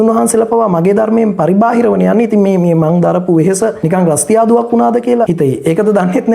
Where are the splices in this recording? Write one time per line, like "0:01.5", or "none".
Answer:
0:03.8
0:05.3